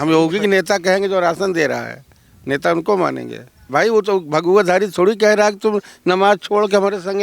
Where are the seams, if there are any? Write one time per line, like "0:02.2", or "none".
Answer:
0:03.7